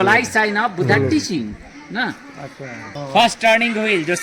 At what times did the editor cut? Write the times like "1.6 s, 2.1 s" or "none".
2.9 s